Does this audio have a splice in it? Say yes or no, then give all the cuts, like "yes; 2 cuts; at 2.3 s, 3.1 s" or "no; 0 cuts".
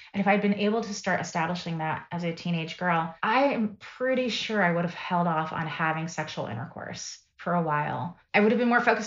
yes; 2 cuts; at 3.1 s, 8.1 s